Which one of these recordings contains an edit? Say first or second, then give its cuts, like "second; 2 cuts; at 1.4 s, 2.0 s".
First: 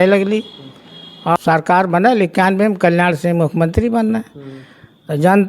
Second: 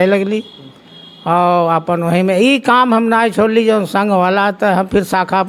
first; 1 cut; at 1.4 s